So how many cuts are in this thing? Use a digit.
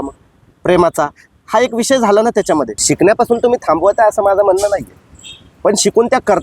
1